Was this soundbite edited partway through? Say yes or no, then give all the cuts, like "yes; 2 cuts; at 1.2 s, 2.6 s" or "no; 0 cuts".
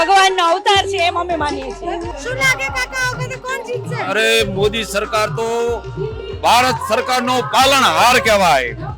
yes; 1 cut; at 2.1 s